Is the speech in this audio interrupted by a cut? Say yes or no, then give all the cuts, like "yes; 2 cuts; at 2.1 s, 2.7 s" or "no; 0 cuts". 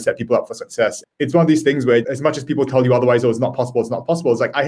no; 0 cuts